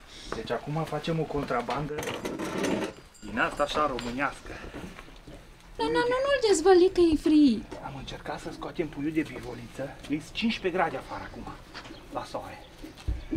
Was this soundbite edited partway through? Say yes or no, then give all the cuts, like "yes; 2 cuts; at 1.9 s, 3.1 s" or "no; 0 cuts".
yes; 1 cut; at 5.8 s